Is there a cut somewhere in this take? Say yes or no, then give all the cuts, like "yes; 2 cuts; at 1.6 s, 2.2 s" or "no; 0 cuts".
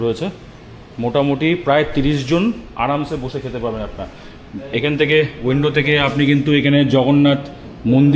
no; 0 cuts